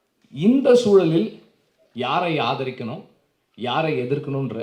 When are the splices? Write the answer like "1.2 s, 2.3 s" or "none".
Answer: none